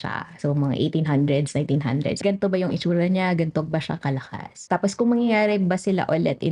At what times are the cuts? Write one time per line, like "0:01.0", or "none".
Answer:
0:02.2
0:04.6

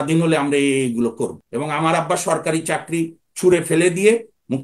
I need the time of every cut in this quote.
0:01.4

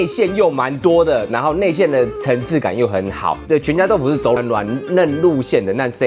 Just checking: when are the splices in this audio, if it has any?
0:03.4

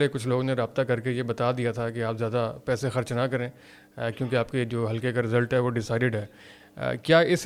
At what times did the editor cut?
none

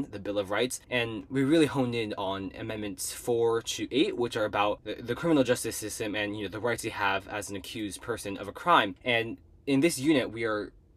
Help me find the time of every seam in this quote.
0:00.8
0:04.9
0:09.0

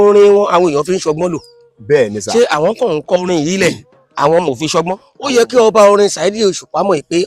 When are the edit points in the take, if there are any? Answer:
0:05.0

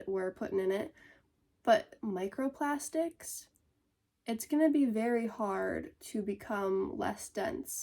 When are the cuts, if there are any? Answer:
0:02.0

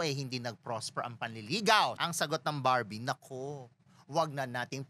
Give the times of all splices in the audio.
0:02.0

